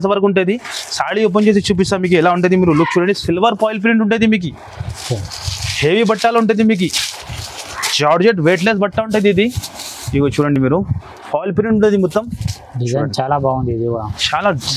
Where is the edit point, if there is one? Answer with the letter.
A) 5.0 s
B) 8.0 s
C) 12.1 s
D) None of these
D